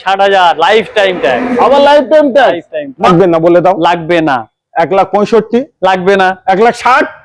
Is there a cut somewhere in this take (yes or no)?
yes